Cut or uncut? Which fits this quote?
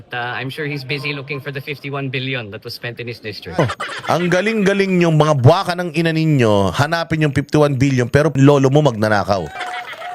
cut